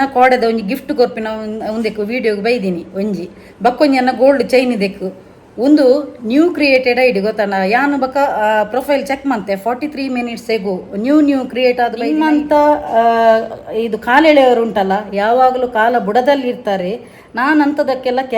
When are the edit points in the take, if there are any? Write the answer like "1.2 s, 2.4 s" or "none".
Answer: 12.0 s